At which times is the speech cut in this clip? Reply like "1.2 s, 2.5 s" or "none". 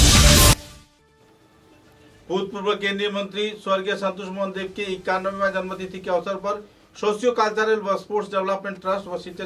1.1 s